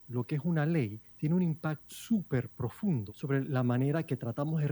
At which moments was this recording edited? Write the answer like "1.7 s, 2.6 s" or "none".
1.0 s, 1.9 s, 3.1 s